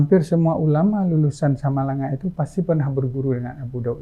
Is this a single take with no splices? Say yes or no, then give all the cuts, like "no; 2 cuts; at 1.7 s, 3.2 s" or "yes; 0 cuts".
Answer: yes; 0 cuts